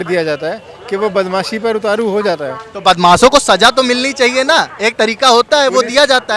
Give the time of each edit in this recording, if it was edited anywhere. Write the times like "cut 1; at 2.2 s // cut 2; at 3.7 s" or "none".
none